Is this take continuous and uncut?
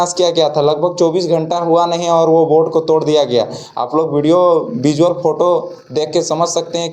yes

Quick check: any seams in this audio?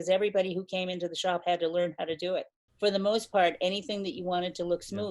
yes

